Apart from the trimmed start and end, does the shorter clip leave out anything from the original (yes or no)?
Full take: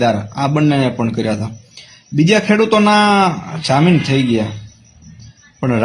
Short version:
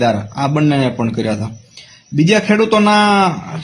no